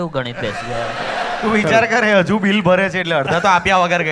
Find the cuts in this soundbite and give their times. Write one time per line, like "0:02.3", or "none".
none